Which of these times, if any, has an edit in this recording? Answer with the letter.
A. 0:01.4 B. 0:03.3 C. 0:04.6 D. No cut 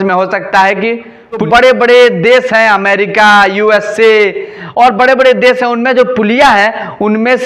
A